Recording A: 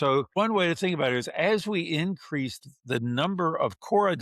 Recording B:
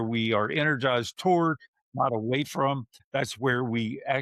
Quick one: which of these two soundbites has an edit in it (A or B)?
B